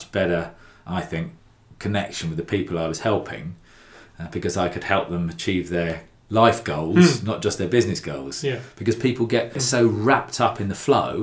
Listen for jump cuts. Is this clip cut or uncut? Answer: cut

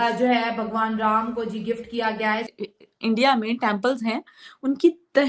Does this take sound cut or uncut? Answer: cut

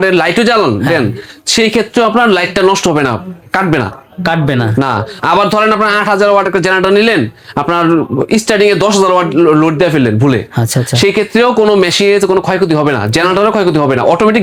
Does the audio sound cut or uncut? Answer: uncut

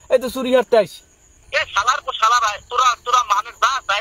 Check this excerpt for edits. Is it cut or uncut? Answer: cut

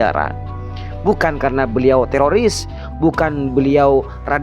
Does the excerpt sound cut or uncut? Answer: uncut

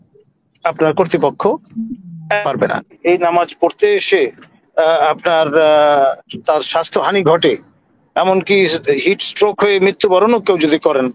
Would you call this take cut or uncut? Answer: cut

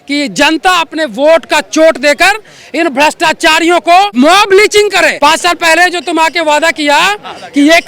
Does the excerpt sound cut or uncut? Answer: cut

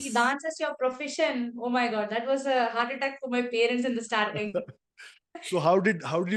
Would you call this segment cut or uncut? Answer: uncut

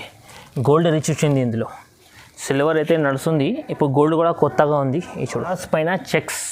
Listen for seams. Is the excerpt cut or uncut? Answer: cut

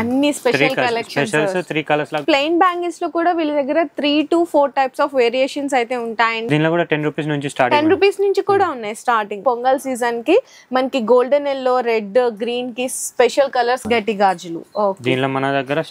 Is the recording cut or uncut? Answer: cut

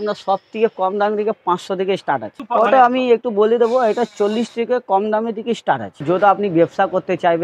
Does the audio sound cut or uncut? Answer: cut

